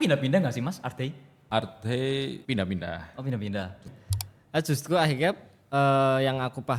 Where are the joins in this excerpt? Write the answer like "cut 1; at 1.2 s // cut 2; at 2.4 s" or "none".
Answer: cut 1; at 1.3 s // cut 2; at 2.4 s // cut 3; at 3.8 s